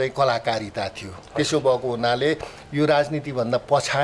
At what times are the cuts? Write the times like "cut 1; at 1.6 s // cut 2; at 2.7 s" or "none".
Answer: none